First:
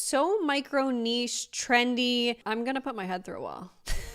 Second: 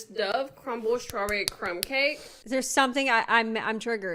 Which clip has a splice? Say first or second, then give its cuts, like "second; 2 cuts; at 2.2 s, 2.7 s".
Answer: first; 1 cut; at 2.4 s